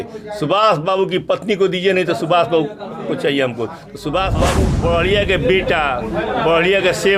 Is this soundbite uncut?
no; 1 cut; at 4.7 s

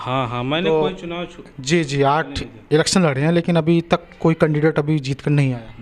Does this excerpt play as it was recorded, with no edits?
yes; 0 cuts

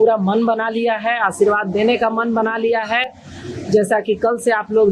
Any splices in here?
no; 0 cuts

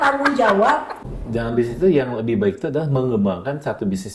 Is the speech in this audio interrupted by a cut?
yes; 1 cut; at 1.0 s

